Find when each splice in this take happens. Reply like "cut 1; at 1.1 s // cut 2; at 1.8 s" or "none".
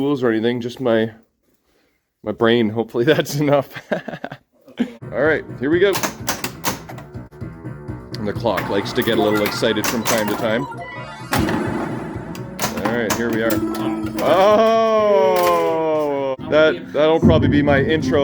cut 1; at 5.0 s // cut 2; at 7.3 s // cut 3; at 16.3 s

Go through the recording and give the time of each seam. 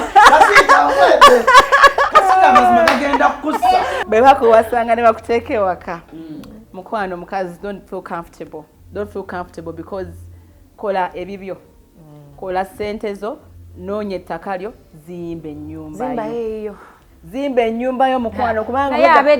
cut 1; at 4.0 s

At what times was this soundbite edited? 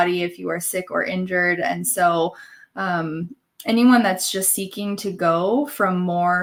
none

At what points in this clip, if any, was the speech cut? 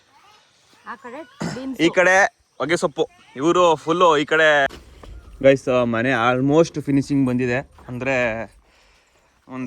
cut 1; at 4.7 s

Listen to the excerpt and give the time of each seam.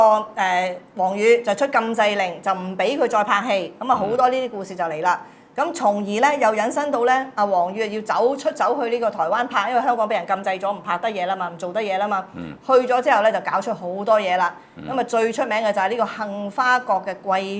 none

